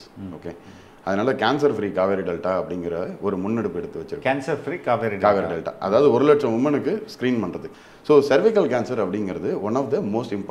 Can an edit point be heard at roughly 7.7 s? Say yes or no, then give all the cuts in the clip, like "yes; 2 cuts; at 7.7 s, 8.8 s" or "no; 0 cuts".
yes; 1 cut; at 7.7 s